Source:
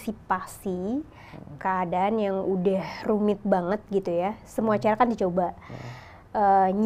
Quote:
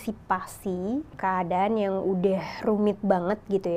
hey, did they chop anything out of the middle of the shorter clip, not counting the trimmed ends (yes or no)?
yes